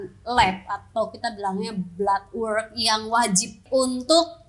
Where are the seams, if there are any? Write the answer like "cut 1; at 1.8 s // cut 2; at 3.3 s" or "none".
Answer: cut 1; at 3.6 s